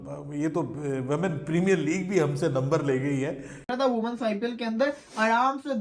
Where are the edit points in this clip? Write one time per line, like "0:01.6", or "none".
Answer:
0:03.7